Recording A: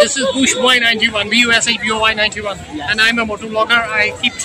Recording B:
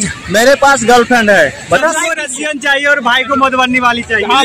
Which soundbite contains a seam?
B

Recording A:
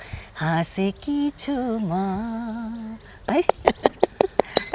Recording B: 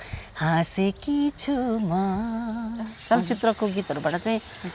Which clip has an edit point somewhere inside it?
B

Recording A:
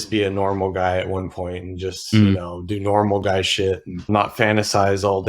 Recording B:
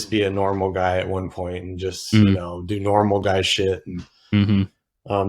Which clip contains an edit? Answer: A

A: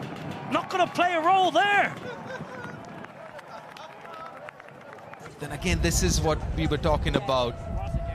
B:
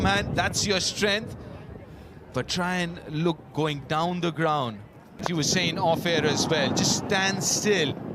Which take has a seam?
B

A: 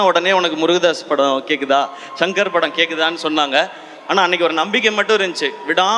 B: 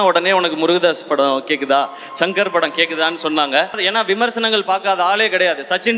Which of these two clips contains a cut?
B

